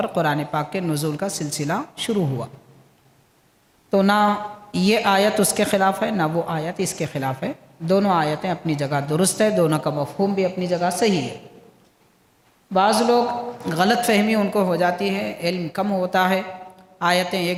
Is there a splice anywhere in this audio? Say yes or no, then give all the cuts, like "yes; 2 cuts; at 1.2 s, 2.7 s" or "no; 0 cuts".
no; 0 cuts